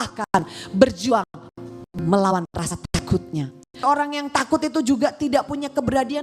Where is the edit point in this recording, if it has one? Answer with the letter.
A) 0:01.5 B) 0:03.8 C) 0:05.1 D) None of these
B